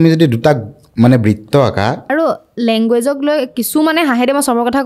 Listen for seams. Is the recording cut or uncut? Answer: cut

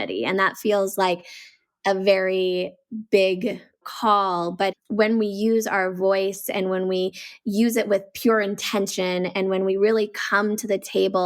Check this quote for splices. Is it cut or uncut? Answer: cut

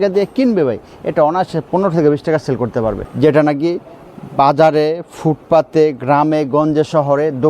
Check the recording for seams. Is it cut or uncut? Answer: cut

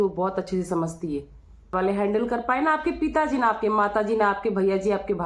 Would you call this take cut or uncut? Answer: cut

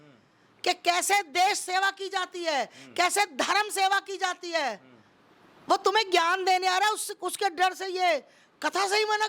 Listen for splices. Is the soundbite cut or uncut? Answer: uncut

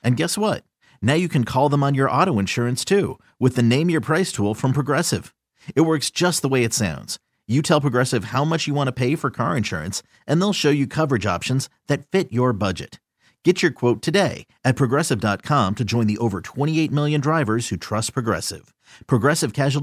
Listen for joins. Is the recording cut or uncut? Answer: uncut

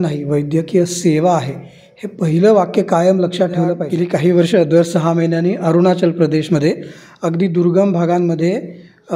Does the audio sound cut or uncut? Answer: cut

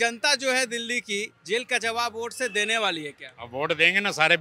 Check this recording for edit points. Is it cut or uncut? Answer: uncut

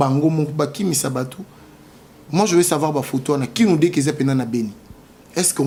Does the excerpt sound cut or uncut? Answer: uncut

